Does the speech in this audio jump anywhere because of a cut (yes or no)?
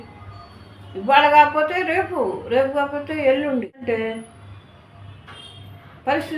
yes